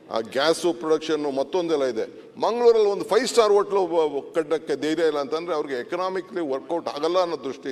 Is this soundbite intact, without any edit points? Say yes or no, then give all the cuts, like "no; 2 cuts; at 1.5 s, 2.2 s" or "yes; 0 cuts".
yes; 0 cuts